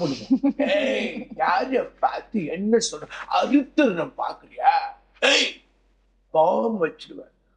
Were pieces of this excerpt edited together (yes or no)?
no